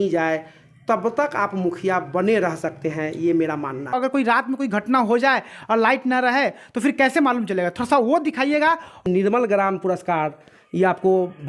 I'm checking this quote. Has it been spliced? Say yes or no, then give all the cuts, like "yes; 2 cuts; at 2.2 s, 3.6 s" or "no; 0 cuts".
yes; 2 cuts; at 3.9 s, 9.0 s